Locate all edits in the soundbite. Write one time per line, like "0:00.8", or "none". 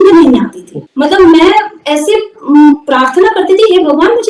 none